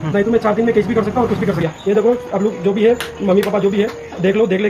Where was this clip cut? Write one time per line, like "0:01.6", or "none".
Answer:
0:01.6